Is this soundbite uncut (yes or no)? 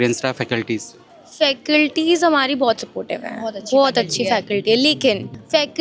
yes